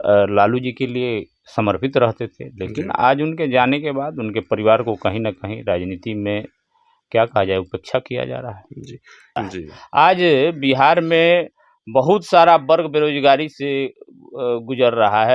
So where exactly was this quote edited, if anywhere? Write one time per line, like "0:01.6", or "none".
0:09.2